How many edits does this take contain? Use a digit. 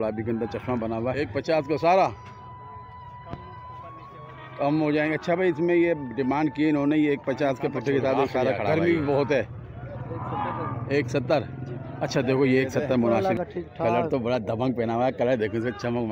3